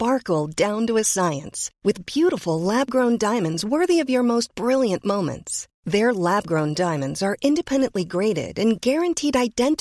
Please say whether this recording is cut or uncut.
uncut